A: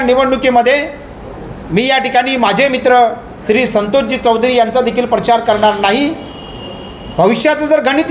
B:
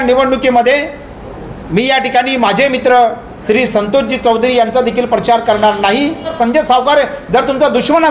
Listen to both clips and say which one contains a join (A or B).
B